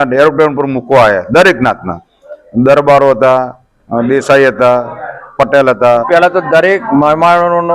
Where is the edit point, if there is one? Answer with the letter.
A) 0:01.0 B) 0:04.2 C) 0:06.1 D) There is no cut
C